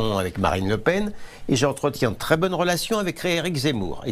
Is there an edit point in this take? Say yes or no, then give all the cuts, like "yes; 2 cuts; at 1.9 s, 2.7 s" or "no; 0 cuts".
no; 0 cuts